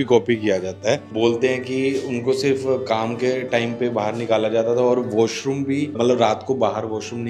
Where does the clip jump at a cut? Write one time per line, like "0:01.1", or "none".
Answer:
none